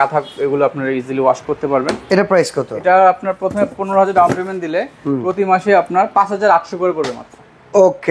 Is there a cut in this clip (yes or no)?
no